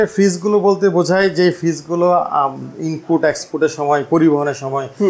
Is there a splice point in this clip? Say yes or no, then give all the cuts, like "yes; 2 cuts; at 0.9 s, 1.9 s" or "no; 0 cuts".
no; 0 cuts